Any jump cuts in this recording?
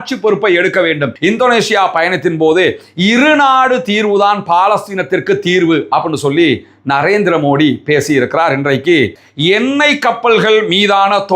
yes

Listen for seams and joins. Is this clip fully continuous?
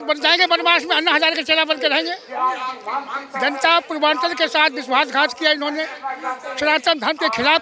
yes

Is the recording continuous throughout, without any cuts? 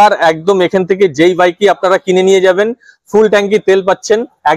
yes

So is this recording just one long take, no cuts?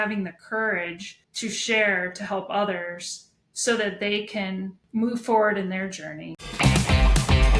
no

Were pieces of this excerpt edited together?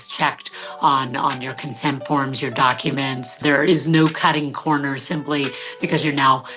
yes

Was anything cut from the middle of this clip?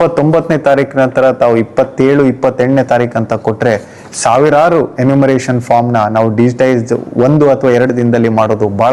no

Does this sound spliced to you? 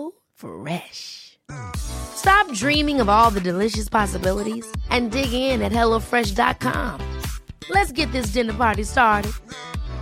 no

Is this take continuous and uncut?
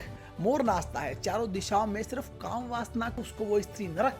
no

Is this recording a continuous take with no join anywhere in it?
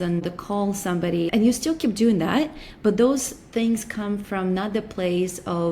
no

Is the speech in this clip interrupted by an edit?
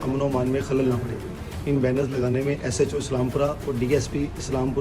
no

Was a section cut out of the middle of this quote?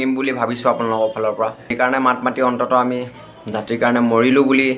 yes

